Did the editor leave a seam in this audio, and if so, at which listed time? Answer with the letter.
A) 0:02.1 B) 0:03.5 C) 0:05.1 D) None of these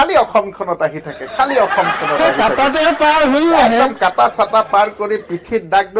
D